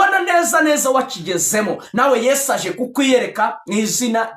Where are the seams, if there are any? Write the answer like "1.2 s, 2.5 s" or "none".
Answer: none